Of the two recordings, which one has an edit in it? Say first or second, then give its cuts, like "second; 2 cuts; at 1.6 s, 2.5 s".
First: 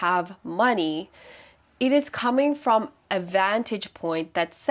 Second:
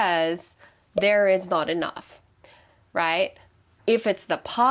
second; 1 cut; at 3.7 s